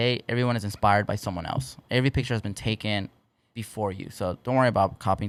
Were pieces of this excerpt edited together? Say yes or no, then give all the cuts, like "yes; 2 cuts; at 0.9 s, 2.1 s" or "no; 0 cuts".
no; 0 cuts